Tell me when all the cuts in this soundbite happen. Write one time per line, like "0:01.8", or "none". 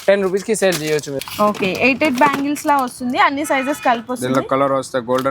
0:01.2